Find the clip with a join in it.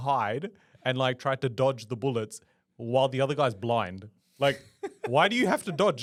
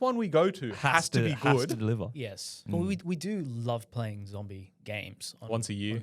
second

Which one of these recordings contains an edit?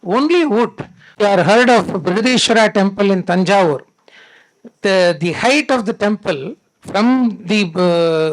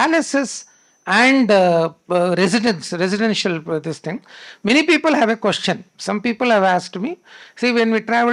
first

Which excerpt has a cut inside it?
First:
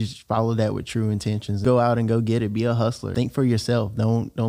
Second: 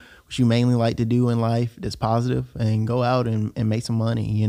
first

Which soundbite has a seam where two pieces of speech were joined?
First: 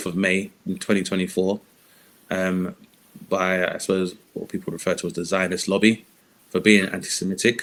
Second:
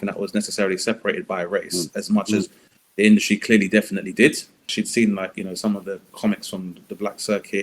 second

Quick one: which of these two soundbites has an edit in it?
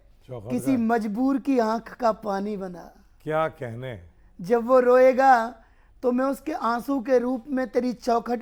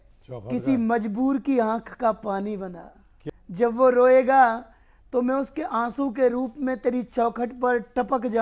second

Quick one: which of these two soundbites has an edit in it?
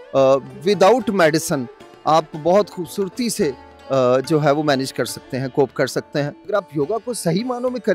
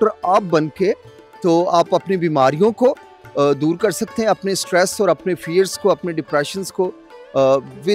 first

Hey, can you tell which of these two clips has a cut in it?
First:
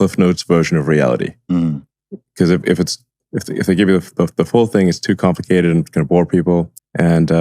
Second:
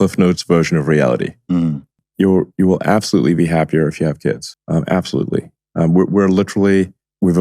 second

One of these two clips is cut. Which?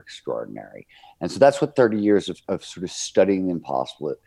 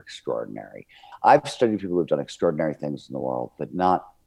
second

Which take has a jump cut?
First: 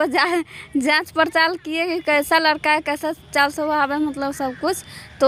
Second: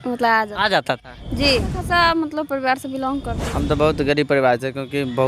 second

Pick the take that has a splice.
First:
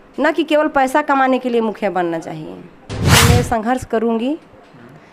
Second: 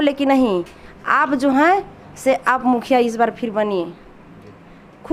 first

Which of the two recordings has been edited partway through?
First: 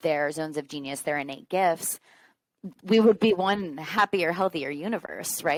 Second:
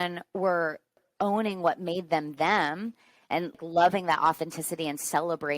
second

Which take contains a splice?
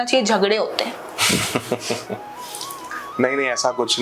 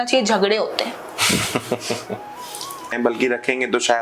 second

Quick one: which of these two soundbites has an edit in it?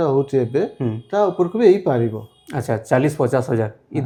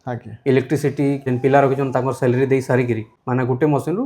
second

